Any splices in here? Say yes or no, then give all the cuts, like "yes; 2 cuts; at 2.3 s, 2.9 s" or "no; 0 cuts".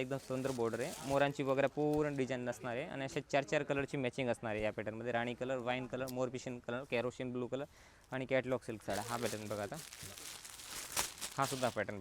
no; 0 cuts